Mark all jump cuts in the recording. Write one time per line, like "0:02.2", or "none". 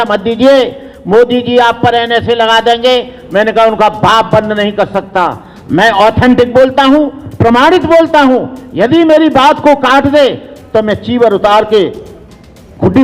none